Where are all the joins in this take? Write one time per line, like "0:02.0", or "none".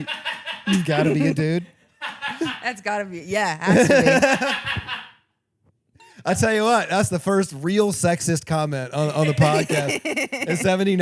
none